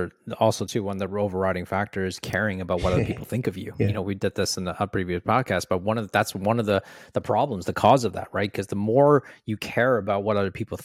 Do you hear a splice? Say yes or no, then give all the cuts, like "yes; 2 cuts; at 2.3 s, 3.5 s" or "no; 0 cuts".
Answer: no; 0 cuts